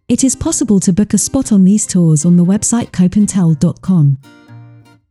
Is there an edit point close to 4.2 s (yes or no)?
yes